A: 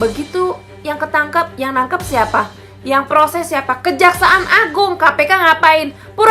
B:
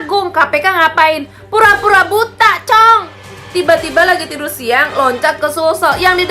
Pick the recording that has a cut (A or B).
B